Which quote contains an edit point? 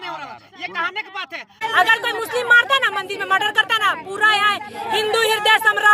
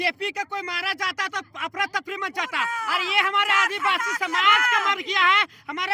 first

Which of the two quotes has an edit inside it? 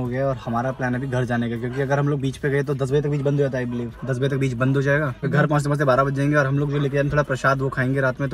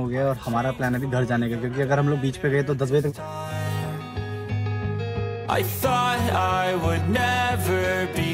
second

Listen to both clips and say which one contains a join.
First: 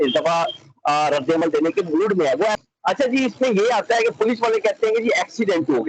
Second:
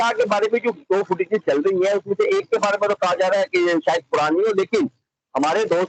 first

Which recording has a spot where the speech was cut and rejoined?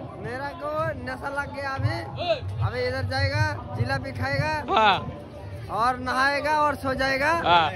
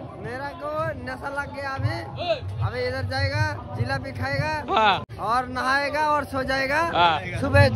second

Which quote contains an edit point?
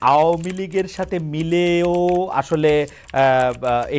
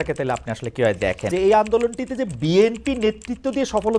second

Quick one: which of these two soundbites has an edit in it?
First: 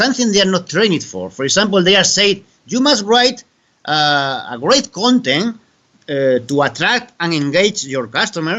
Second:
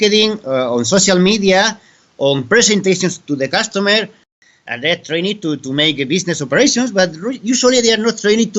second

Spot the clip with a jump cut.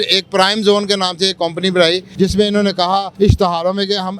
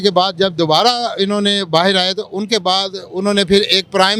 first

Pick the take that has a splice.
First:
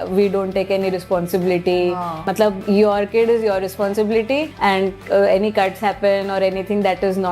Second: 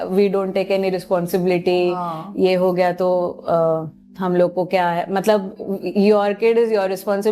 first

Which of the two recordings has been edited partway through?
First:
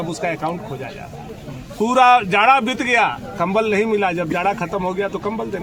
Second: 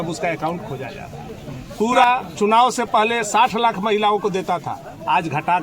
second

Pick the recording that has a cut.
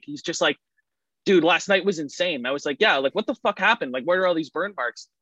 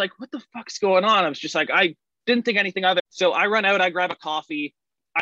second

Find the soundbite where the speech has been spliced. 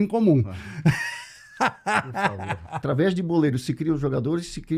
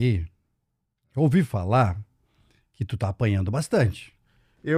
first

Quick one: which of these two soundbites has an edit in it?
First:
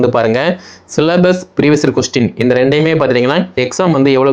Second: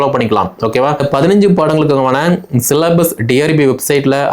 second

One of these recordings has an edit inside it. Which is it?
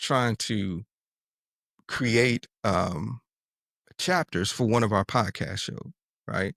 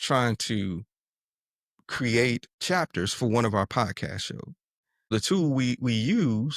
second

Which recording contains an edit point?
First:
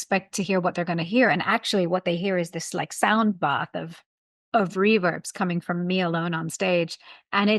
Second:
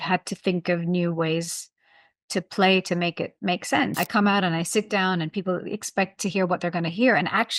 second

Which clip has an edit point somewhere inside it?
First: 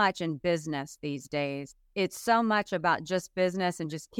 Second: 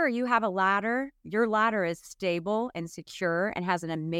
first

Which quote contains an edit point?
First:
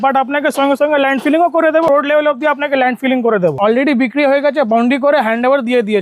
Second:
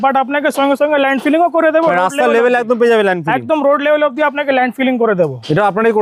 first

